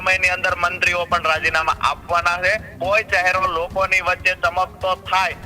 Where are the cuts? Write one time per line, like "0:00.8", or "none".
0:02.7